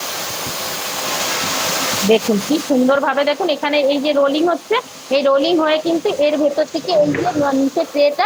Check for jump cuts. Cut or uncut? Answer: uncut